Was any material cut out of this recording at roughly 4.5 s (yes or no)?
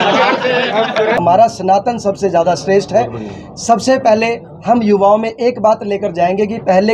no